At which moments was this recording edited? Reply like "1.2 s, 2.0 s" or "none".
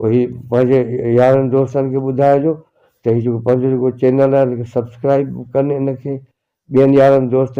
none